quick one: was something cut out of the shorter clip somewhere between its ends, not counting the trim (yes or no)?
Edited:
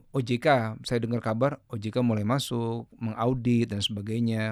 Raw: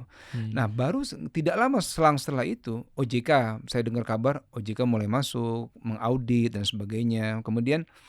no